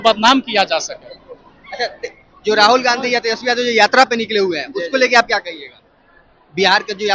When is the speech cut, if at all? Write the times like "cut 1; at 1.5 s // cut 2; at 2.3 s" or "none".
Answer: none